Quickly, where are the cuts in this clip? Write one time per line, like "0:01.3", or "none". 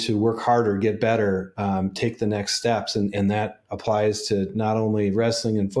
none